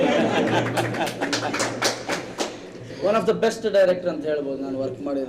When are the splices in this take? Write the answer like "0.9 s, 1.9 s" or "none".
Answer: 2.9 s